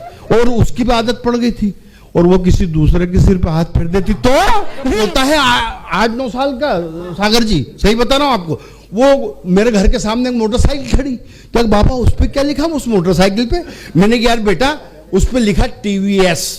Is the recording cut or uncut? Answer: cut